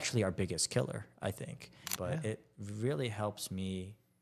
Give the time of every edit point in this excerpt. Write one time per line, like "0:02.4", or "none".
0:01.8